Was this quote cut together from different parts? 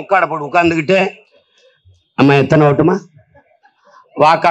no; 0 cuts

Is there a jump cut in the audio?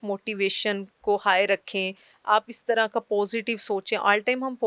no; 0 cuts

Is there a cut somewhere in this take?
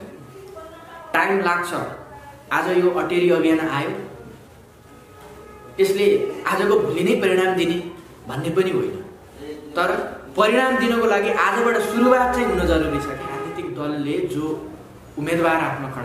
yes; 1 cut; at 13.4 s

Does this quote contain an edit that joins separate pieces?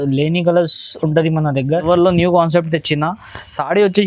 yes; 1 cut; at 1.8 s

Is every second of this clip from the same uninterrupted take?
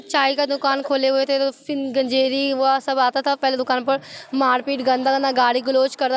yes; 0 cuts

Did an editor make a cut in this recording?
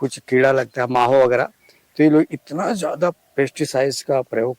no; 0 cuts

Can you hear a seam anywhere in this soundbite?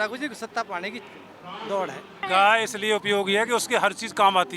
yes; 1 cut; at 2.2 s

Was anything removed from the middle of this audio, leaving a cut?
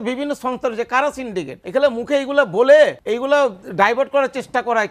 yes; 2 cuts; at 1.6 s, 3.0 s

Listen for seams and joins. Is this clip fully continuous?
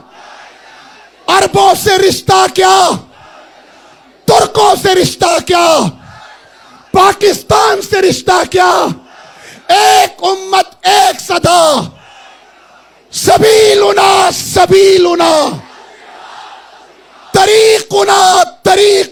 yes; 0 cuts

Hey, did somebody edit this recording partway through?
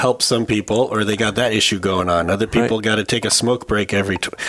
no; 0 cuts

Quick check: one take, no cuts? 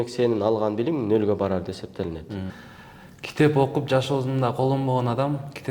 no; 1 cut; at 2.6 s

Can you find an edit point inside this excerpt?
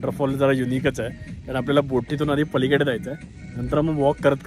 no; 0 cuts

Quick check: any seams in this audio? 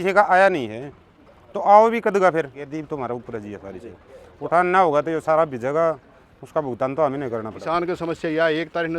yes; 2 cuts; at 2.7 s, 7.5 s

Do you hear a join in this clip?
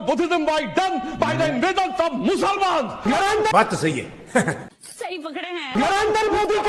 no; 0 cuts

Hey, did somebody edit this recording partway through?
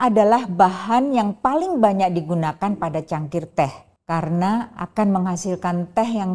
yes; 1 cut; at 3.9 s

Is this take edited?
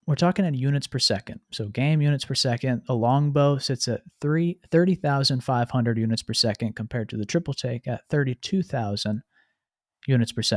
no; 0 cuts

